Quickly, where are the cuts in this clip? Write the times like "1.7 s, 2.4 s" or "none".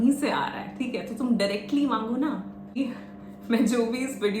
2.8 s